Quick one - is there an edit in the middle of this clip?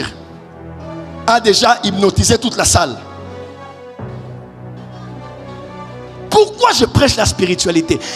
no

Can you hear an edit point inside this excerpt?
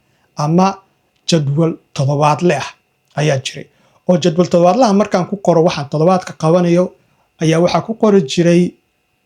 no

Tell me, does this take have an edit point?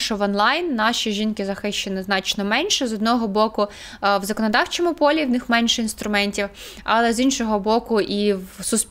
no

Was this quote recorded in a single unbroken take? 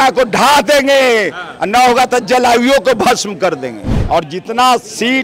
no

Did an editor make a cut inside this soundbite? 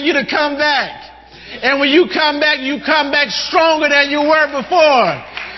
no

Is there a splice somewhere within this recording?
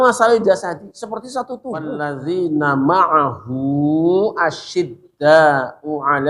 yes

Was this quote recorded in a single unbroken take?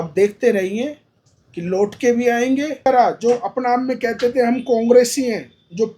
yes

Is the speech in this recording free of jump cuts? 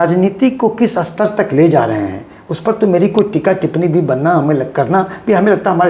yes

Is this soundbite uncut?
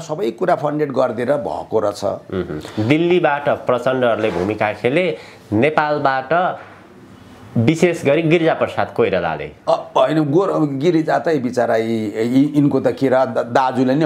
yes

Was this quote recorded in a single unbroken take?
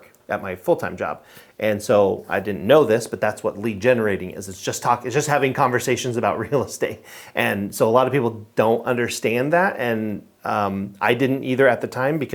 yes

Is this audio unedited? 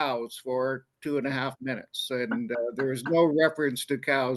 yes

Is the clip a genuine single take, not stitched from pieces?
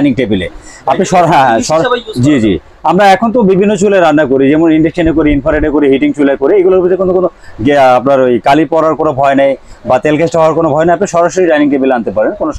yes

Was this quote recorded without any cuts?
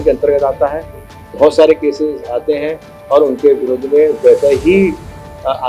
yes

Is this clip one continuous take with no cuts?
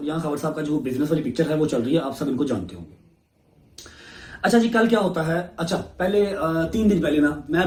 yes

